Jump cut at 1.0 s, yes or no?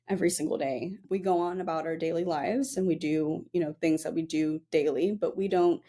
yes